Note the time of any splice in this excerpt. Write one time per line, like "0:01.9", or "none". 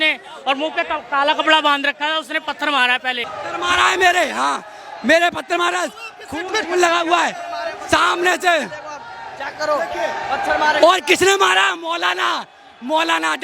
0:03.3